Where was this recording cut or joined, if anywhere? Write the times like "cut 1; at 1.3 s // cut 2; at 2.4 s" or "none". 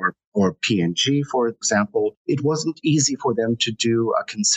cut 1; at 1.8 s